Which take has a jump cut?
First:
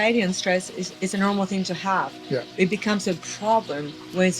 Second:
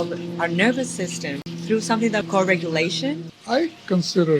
second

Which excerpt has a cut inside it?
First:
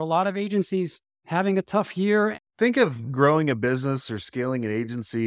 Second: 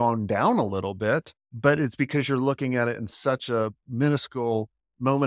first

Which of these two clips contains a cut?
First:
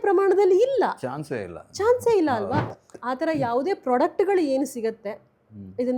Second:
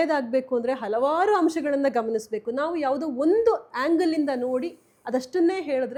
first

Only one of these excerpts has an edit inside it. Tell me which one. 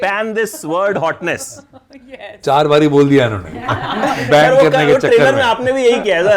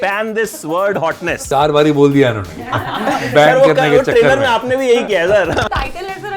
second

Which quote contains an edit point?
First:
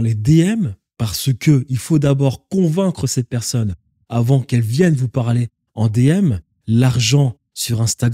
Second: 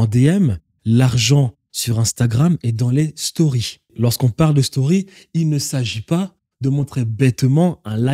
second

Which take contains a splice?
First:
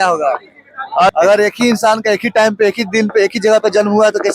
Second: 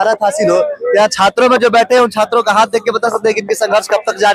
first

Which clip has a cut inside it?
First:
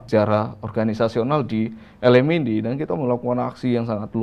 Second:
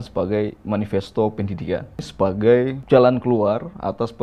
second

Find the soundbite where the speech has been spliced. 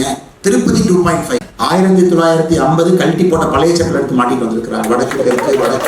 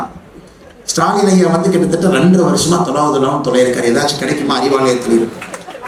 first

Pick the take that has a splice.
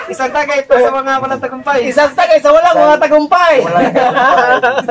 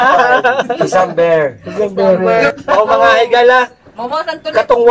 second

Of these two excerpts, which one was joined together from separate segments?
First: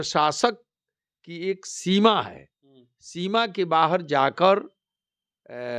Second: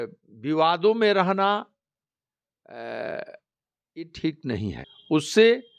second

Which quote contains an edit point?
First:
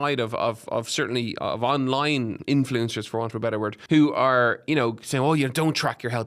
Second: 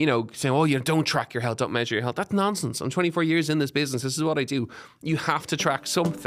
first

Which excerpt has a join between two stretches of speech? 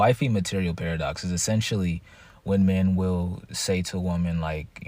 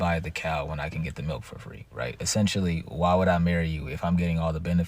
second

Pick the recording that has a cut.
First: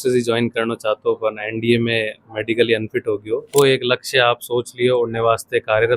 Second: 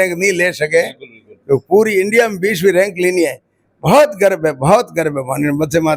first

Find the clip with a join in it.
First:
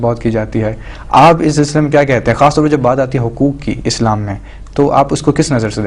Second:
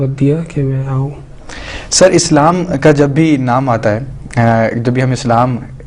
second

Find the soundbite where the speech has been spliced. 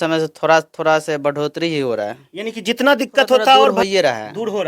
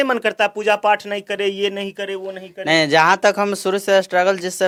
first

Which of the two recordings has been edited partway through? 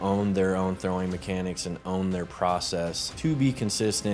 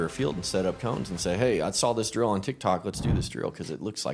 first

